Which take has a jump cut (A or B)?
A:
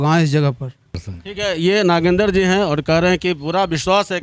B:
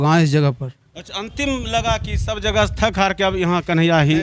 A